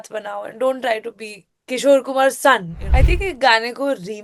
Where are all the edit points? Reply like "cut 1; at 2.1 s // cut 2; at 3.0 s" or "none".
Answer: cut 1; at 2.8 s